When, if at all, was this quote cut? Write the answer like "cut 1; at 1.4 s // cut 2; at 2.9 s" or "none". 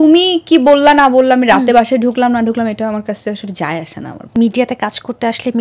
cut 1; at 4.3 s

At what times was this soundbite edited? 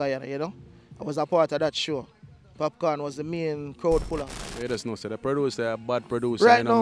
cut 1; at 4.4 s

